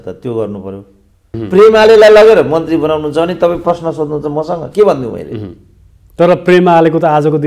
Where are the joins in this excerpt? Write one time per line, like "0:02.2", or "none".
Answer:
0:01.2